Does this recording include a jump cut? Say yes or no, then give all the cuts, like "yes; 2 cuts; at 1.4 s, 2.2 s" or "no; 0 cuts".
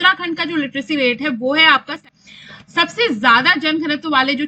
yes; 1 cut; at 1.9 s